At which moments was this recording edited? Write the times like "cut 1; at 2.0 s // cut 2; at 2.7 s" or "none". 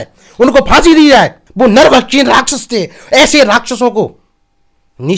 cut 1; at 1.4 s

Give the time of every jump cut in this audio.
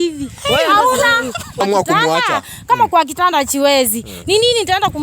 cut 1; at 1.6 s

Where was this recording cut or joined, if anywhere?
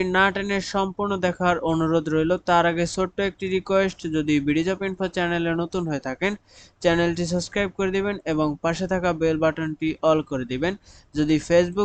none

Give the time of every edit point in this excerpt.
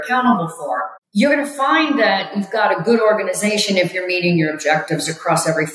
cut 1; at 1.0 s

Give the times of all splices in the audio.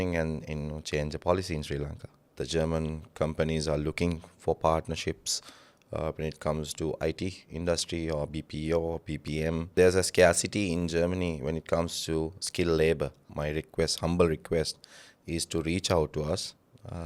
cut 1; at 2.4 s // cut 2; at 9.7 s // cut 3; at 13.2 s

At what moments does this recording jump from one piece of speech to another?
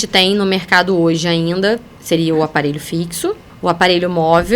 cut 1; at 1.9 s // cut 2; at 3.5 s

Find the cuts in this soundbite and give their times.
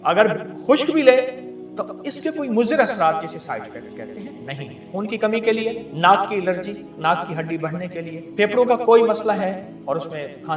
cut 1; at 4.9 s // cut 2; at 5.9 s // cut 3; at 6.9 s // cut 4; at 8.2 s // cut 5; at 9.7 s

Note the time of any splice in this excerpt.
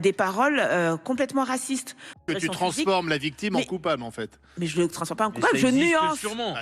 cut 1; at 2.2 s

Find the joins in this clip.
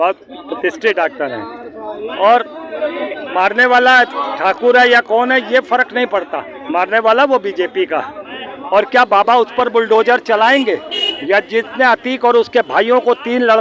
none

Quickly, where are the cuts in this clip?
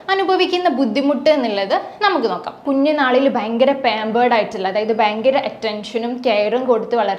cut 1; at 2.6 s

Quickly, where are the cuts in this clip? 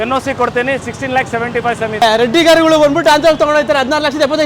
none

